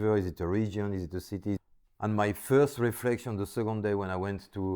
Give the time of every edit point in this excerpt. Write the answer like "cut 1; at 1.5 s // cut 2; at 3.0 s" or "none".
cut 1; at 1.6 s